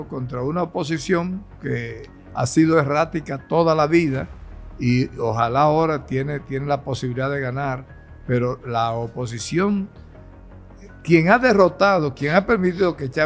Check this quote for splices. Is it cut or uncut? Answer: uncut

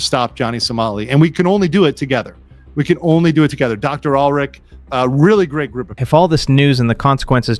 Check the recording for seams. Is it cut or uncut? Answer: uncut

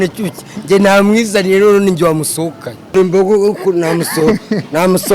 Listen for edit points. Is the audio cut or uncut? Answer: cut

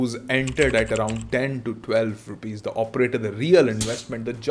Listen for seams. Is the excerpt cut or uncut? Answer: uncut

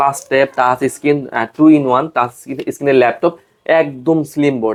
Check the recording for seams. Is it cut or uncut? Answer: uncut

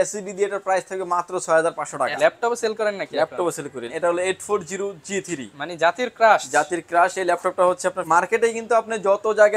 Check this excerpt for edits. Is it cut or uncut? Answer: cut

